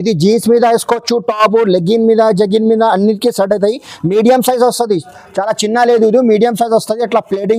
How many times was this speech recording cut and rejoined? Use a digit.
0